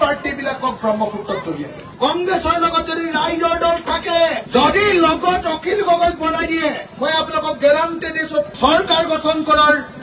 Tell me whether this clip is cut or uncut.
cut